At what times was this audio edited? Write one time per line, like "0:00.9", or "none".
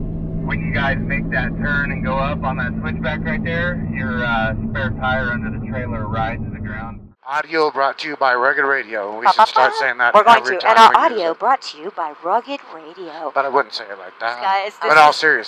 0:06.9
0:14.4